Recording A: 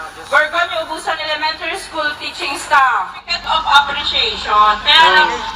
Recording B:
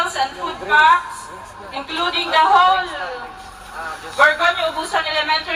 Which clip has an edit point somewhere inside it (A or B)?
A